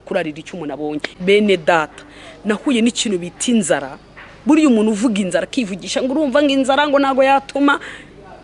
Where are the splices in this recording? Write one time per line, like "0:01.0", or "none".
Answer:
0:01.1